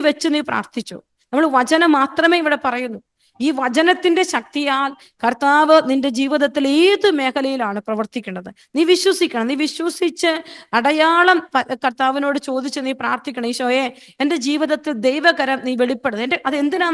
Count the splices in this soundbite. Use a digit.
0